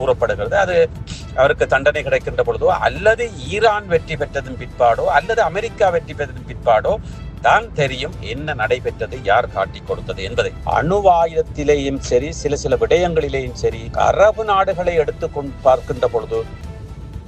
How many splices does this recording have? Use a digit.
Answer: 2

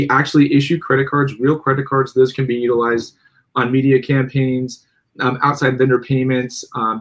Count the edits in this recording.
0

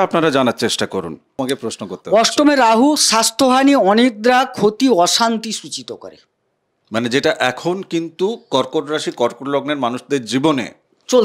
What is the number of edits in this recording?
1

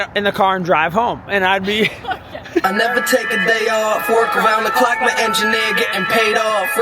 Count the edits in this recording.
1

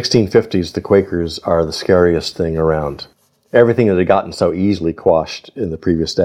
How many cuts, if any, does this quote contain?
1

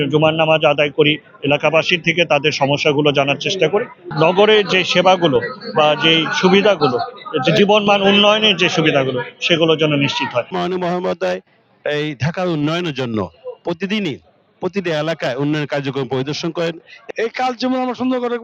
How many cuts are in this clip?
3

